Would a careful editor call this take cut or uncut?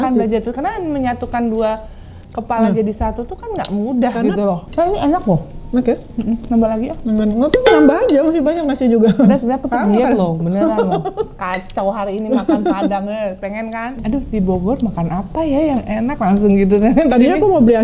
cut